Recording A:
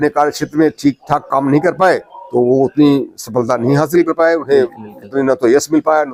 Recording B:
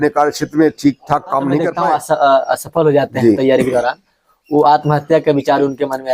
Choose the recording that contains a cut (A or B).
B